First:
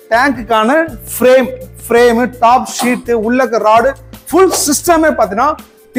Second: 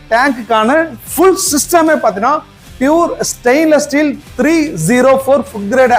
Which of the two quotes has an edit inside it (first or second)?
second